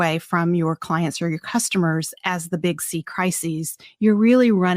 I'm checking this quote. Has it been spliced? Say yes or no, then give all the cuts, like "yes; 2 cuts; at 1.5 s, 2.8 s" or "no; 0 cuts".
yes; 1 cut; at 3.8 s